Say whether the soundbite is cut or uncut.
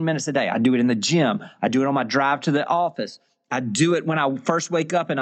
uncut